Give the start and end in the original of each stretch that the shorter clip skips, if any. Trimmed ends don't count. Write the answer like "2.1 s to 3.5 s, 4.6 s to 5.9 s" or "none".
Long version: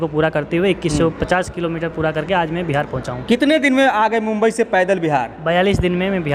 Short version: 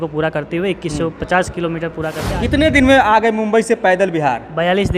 2.4 s to 3.3 s